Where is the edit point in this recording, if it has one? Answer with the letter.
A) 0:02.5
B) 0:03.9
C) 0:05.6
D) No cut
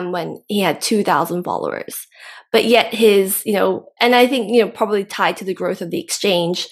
D